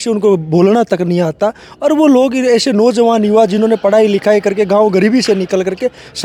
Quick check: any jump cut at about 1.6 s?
no; 0 cuts

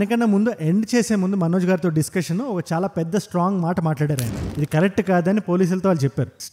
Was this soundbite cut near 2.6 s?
no; 1 cut; at 4.3 s

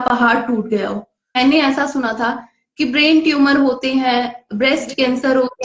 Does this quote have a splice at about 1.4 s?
yes; 1 cut; at 1.4 s

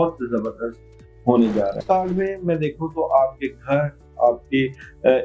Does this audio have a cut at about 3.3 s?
no; 1 cut; at 1.8 s

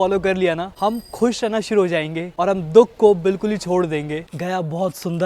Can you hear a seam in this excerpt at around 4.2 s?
yes; 1 cut; at 4.2 s

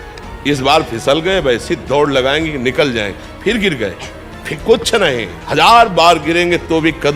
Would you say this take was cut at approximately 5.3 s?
yes; 1 cut; at 5.3 s

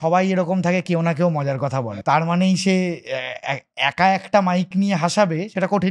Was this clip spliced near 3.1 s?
no; 1 cut; at 1.8 s

